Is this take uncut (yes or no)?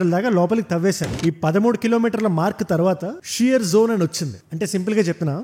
no